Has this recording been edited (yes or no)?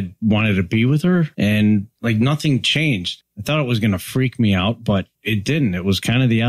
yes